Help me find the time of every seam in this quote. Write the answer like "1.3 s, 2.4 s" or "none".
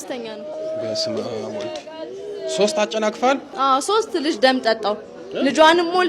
3.5 s